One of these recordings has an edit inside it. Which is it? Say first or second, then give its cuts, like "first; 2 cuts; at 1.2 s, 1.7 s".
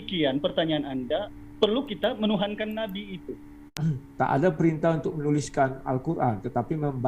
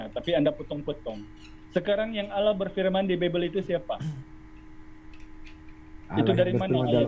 first; 1 cut; at 3.8 s